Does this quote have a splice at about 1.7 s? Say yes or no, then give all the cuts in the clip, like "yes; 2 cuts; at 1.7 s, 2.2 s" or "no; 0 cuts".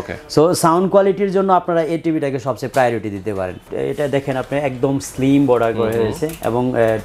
no; 1 cut; at 3.7 s